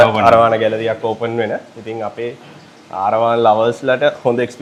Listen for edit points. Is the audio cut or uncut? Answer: uncut